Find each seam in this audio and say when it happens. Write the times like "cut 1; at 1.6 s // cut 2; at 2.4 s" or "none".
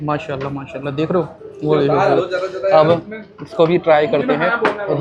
none